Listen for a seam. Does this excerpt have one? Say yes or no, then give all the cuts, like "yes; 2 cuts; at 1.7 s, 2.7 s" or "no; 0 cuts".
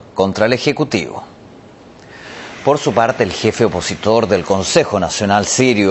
no; 0 cuts